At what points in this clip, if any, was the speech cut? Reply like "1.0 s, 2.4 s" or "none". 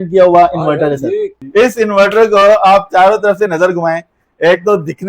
1.3 s